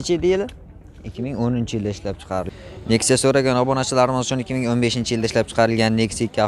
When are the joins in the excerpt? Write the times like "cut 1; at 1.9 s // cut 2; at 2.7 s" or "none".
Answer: cut 1; at 2.5 s